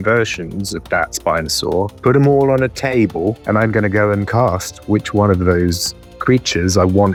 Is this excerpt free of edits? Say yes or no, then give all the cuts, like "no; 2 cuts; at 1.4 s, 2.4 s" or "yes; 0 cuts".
yes; 0 cuts